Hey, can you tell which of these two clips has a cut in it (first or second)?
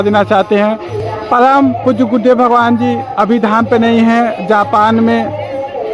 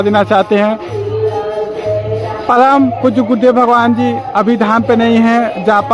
first